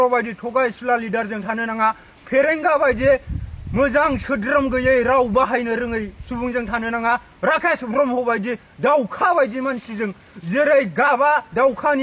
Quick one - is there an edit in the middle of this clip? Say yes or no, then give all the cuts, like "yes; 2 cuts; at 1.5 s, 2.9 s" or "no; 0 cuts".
no; 0 cuts